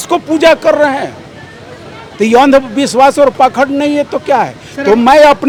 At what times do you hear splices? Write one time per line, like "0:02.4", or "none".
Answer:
none